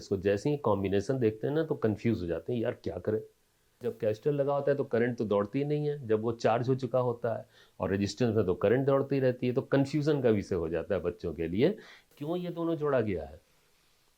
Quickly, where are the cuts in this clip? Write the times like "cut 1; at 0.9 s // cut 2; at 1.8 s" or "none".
cut 1; at 3.9 s // cut 2; at 12.1 s